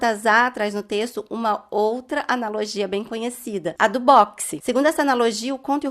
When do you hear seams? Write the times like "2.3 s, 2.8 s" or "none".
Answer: 4.5 s